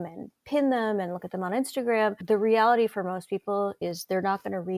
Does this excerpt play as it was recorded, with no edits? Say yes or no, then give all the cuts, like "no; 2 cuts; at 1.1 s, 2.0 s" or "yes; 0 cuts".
no; 2 cuts; at 2.2 s, 3.8 s